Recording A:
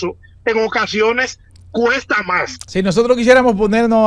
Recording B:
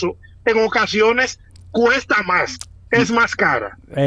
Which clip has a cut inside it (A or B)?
A